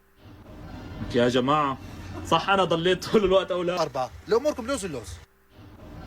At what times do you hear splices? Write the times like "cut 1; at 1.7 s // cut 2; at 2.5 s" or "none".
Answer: cut 1; at 3.8 s